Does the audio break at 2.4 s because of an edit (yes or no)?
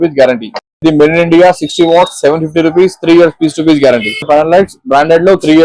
no